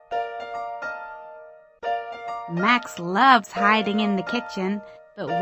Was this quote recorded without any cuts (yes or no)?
no